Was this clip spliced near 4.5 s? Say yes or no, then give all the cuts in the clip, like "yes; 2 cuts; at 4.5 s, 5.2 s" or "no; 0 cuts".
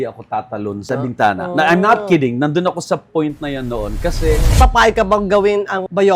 yes; 1 cut; at 4.5 s